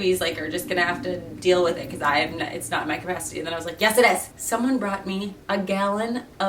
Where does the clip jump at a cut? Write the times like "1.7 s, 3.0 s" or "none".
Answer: 4.3 s